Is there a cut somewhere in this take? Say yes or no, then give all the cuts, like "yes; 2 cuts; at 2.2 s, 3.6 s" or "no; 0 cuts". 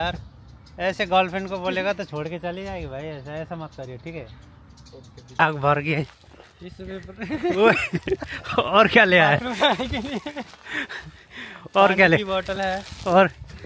yes; 1 cut; at 5.4 s